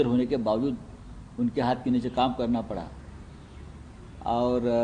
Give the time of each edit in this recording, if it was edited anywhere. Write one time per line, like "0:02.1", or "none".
none